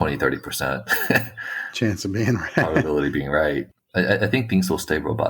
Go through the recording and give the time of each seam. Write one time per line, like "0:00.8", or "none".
0:03.8